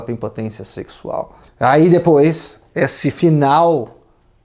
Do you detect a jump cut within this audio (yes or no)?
no